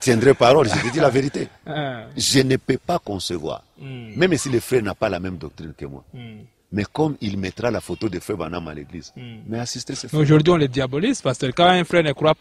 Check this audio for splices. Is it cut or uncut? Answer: uncut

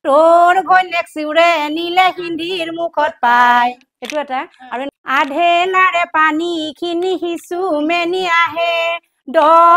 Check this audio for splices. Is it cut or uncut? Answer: cut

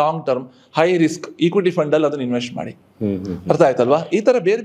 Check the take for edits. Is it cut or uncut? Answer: uncut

